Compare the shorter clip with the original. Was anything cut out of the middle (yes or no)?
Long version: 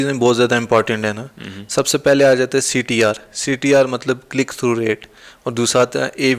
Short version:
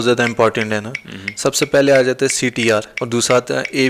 yes